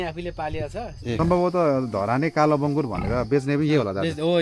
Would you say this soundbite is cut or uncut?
cut